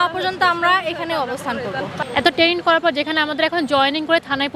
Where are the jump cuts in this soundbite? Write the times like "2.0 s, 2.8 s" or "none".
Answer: 2.0 s